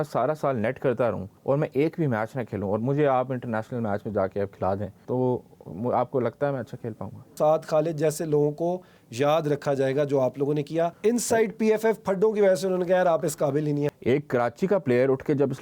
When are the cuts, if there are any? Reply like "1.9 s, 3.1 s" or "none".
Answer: 1.3 s, 5.0 s, 7.3 s, 11.0 s, 13.9 s